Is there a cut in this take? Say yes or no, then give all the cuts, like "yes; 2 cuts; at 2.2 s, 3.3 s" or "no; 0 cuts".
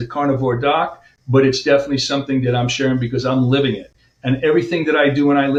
no; 0 cuts